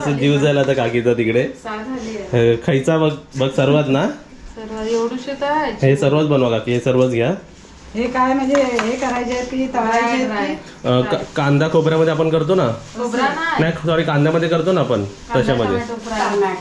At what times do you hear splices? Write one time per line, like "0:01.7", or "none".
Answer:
none